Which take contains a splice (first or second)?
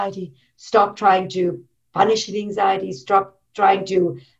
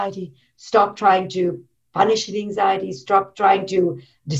second